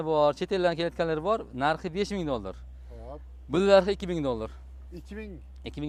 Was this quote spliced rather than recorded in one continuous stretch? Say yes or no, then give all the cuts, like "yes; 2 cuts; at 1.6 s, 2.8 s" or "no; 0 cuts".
no; 0 cuts